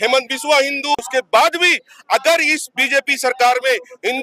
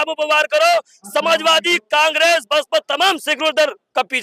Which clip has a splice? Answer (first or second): first